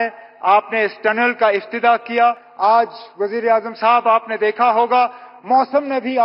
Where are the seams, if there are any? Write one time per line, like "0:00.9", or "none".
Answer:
0:02.5